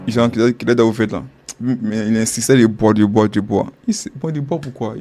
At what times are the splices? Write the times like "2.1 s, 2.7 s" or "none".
none